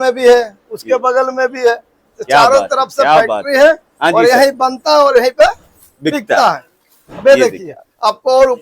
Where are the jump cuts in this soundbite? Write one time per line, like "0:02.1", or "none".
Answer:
none